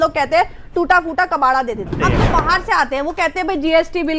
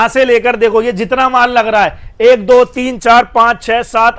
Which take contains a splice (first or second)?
first